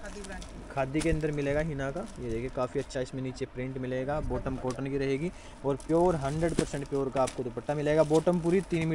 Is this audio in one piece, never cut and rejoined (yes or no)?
yes